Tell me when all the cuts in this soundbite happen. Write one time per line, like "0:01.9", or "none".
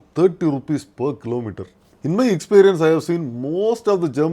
0:02.0